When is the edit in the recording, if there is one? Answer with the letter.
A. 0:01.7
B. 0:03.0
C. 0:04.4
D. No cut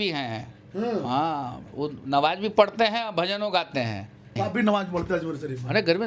C